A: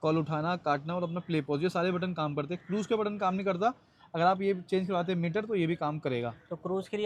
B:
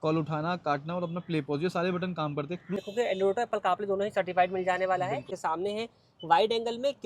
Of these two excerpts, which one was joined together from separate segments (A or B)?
B